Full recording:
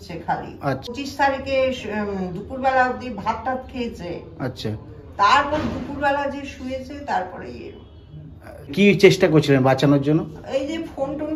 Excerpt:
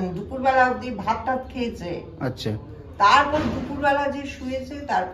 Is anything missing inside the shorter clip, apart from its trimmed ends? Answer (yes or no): no